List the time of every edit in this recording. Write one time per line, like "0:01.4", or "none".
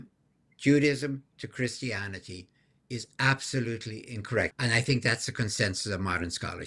0:04.5